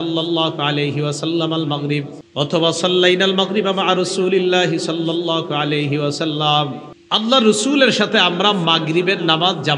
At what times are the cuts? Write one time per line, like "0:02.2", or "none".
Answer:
0:02.2
0:06.9